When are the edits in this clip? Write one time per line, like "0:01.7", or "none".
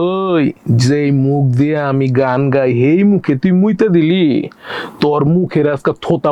none